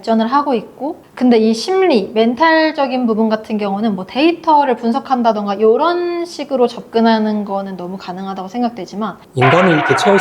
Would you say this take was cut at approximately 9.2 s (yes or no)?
yes